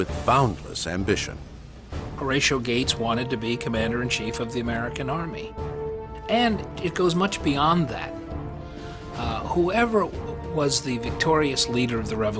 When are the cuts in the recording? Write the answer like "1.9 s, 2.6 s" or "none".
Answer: 7.0 s